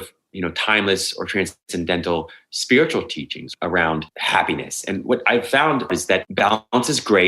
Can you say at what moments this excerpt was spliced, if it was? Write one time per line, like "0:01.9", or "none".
0:03.4
0:04.1
0:05.9